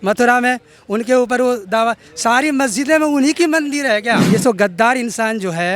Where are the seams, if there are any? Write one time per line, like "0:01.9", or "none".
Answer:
0:04.2